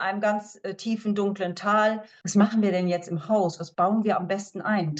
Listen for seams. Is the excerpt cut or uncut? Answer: cut